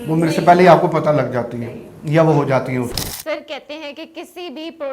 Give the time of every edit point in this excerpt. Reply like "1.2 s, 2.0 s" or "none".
3.0 s